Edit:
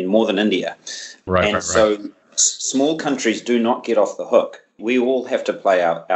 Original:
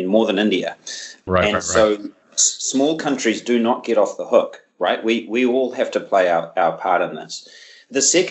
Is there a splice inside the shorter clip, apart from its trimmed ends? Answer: yes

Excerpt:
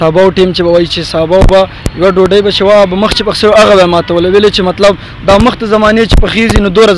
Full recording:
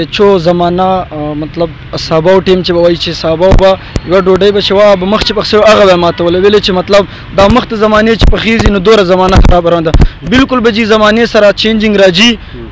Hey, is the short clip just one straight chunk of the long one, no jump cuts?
yes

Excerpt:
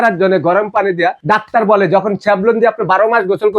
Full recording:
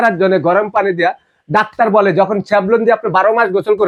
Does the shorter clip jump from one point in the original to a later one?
yes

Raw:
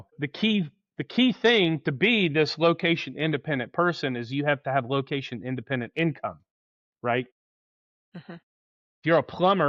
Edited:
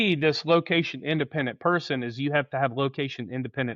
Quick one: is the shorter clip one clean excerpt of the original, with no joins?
yes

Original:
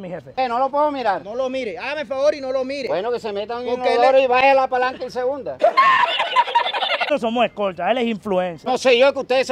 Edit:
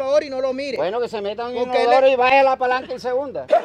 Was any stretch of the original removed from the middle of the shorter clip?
no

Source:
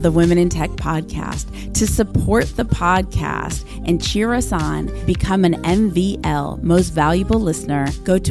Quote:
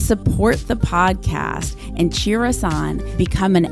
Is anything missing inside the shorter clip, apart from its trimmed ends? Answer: no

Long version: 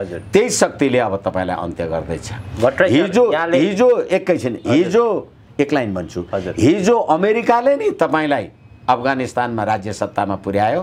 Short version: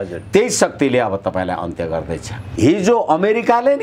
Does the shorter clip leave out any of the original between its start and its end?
yes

